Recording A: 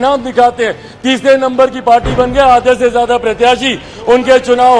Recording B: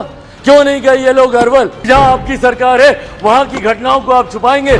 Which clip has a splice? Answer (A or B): B